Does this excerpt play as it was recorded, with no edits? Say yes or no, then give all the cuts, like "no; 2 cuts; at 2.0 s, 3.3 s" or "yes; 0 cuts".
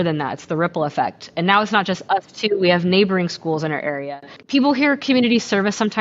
no; 1 cut; at 4.0 s